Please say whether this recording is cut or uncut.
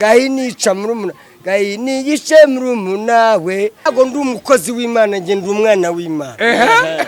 cut